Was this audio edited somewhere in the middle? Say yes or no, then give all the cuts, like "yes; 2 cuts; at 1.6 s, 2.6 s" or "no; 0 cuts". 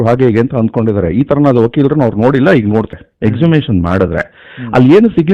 yes; 1 cut; at 3.0 s